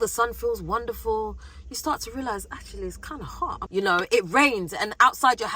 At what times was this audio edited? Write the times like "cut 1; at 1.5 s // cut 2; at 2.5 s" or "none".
cut 1; at 3.6 s